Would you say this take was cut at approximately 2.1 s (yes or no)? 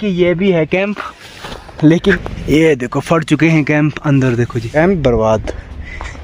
yes